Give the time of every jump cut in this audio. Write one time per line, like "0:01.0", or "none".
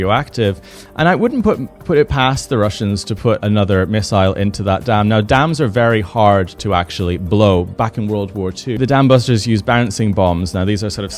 0:08.8